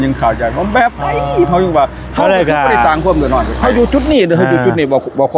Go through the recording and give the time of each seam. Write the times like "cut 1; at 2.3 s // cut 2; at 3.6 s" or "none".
cut 1; at 3.6 s